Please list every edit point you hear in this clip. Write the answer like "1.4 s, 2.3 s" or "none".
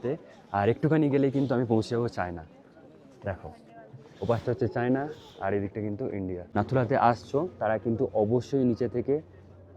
6.4 s

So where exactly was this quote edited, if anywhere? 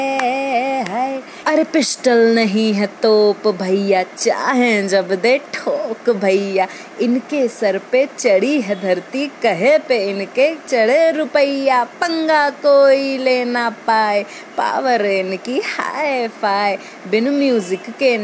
1.3 s

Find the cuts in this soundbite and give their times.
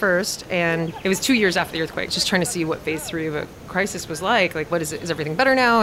0.9 s, 2.1 s

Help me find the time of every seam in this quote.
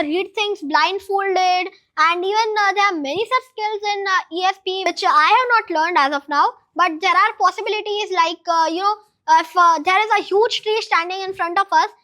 4.9 s

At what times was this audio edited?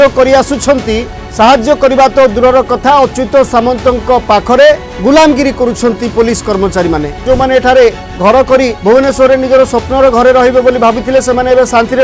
1.2 s, 4.9 s, 7.2 s, 8.8 s

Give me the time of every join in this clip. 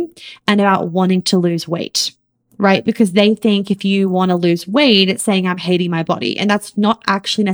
none

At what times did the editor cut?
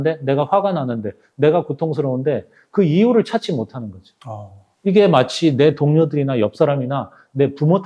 none

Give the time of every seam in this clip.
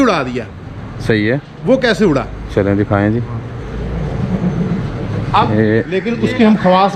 6.0 s

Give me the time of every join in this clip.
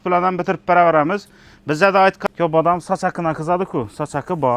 2.2 s

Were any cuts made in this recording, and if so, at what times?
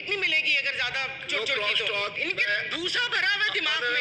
2.1 s

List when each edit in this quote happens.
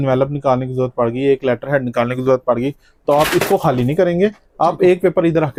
none

